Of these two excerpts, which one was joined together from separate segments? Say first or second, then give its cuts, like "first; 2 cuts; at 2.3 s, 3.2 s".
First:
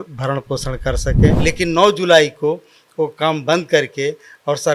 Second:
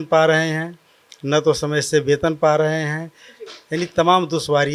first; 1 cut; at 1.4 s